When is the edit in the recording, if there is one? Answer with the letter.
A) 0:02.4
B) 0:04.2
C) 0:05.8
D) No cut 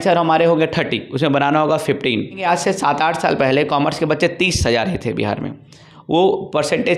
A